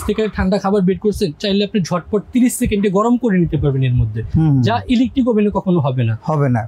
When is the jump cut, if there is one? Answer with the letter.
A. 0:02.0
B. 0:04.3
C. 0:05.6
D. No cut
D